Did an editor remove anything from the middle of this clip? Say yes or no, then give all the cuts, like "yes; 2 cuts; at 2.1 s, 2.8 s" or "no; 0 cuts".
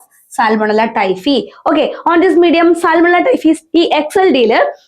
yes; 1 cut; at 3.6 s